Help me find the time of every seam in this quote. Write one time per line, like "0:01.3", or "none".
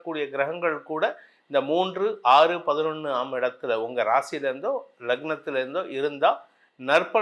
none